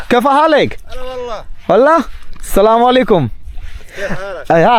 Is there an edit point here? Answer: no; 0 cuts

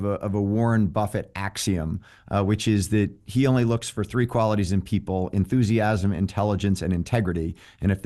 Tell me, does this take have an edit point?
no; 0 cuts

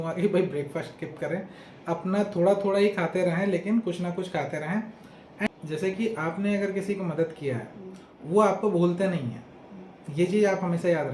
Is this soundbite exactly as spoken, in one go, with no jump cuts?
no; 1 cut; at 5.5 s

